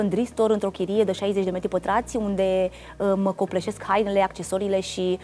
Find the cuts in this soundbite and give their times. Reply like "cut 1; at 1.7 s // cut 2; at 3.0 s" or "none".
none